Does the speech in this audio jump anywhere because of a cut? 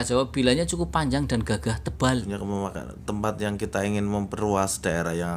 yes; 1 cut; at 2.2 s

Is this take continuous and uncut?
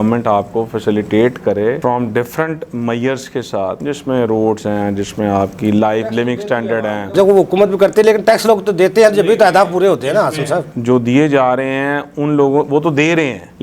yes; 0 cuts

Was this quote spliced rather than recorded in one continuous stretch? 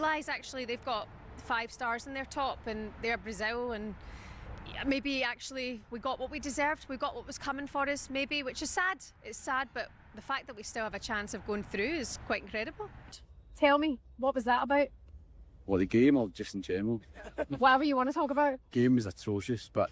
no; 0 cuts

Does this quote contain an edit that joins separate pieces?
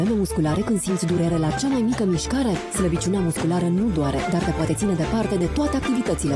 no; 0 cuts

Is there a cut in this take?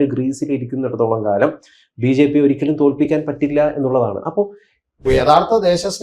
yes; 1 cut; at 5.0 s

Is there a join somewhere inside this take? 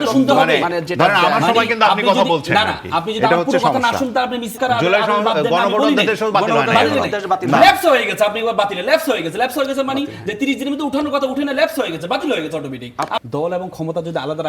yes; 2 cuts; at 4.5 s, 13.2 s

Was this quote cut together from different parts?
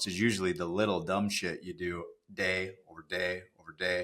no; 0 cuts

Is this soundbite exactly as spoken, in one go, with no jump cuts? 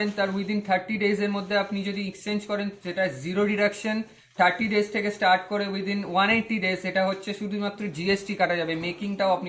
yes; 0 cuts

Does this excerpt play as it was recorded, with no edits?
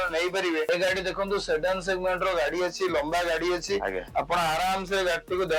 yes; 0 cuts

